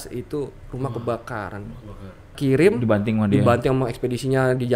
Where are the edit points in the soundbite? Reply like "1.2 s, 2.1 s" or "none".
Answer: 2.3 s